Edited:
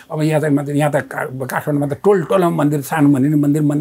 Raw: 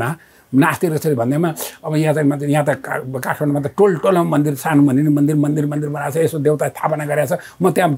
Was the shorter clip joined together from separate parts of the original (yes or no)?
no